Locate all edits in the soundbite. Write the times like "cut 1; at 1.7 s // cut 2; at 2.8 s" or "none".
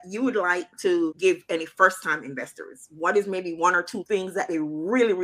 cut 1; at 1.2 s // cut 2; at 4.0 s

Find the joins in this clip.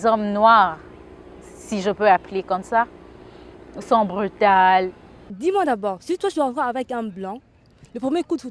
cut 1; at 5.3 s

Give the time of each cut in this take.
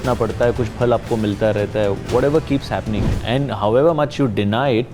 cut 1; at 3.1 s

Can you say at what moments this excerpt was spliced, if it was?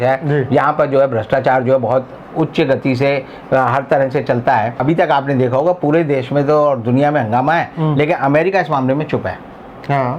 cut 1; at 4.8 s

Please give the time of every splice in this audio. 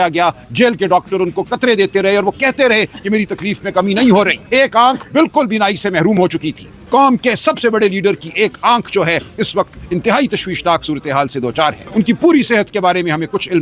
cut 1; at 4.4 s // cut 2; at 6.7 s // cut 3; at 11.8 s

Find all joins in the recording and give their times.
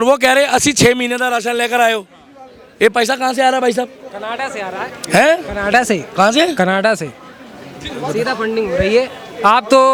none

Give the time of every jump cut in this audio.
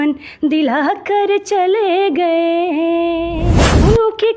cut 1; at 3.4 s

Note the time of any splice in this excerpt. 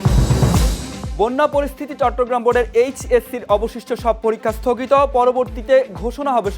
cut 1; at 1.0 s

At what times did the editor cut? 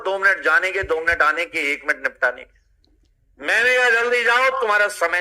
none

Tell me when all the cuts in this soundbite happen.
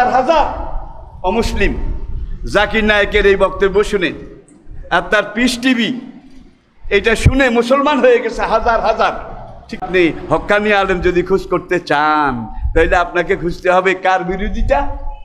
cut 1; at 9.8 s

